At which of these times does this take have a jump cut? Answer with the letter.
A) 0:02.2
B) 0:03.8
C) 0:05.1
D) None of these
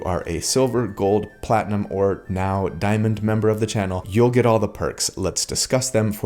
D